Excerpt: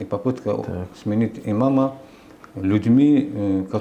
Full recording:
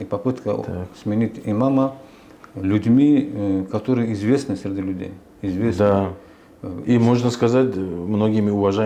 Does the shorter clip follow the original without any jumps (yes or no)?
yes